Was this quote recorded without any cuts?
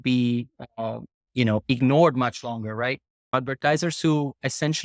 no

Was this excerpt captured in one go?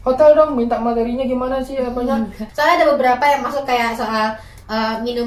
no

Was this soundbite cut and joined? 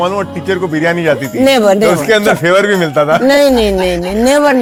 no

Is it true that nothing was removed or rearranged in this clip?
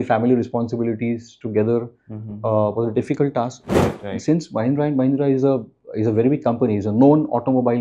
no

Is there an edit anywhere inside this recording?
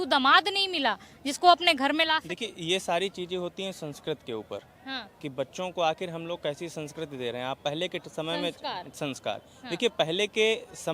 no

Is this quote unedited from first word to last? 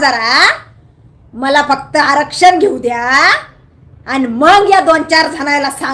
yes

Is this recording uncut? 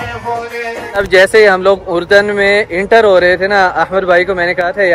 no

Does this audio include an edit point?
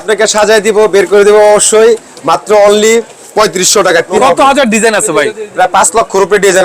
yes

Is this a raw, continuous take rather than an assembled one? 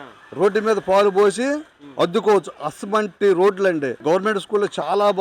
no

